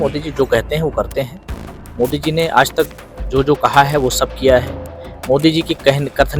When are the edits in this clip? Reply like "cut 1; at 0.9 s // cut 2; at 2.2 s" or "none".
none